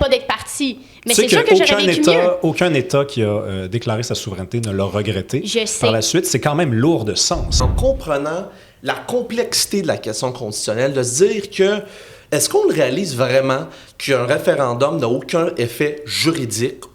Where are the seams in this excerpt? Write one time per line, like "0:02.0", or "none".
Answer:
0:07.7